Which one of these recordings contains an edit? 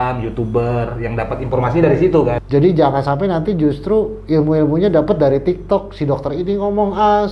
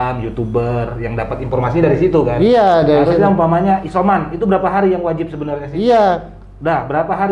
first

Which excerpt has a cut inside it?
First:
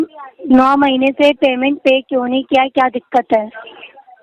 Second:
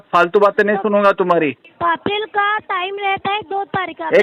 second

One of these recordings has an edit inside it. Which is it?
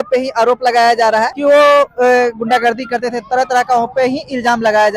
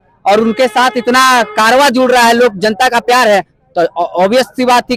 first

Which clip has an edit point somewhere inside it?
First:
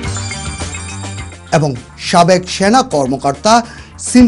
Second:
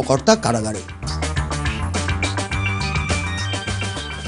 first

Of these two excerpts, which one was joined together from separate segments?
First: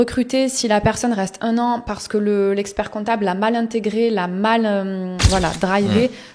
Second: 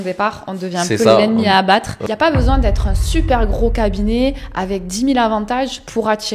second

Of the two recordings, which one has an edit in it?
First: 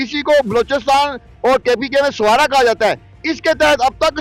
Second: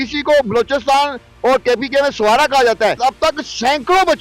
second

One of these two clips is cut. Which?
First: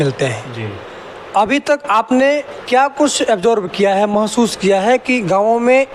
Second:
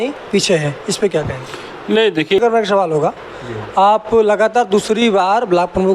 second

